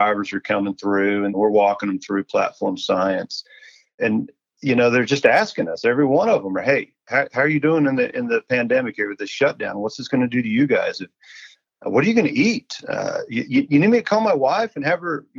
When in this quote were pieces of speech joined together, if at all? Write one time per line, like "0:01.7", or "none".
0:01.3
0:04.0